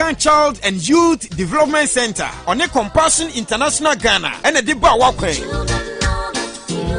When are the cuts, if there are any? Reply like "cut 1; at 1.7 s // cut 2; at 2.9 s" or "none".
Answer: cut 1; at 2.2 s